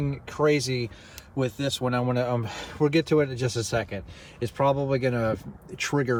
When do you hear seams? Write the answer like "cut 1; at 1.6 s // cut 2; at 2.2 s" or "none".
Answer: none

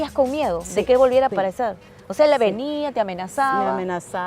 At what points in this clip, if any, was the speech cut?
cut 1; at 1.3 s

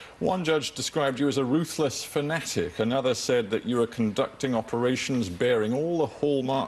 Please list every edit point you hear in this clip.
cut 1; at 1.7 s

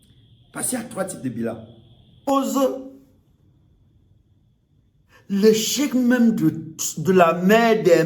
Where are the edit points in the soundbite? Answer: cut 1; at 2.3 s

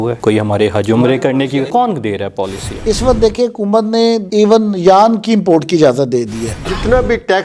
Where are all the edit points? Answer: cut 1; at 1.7 s // cut 2; at 2.8 s // cut 3; at 6.5 s

